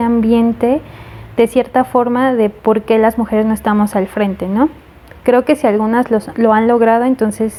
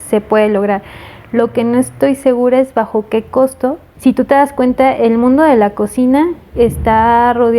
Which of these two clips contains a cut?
second; 1 cut; at 3.9 s

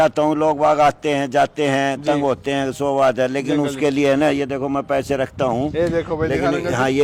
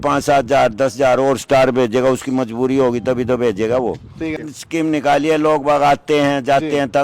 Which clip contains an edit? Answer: second; 1 cut; at 4.4 s

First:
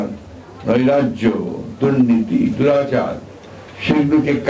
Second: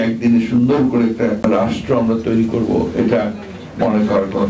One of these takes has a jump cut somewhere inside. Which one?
second; 1 cut; at 1.4 s

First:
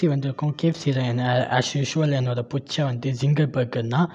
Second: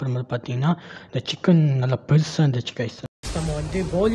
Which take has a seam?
second; 1 cut; at 3.2 s

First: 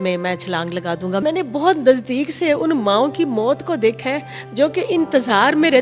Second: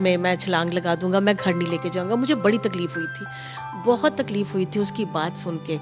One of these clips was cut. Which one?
first; 1 cut; at 1.2 s

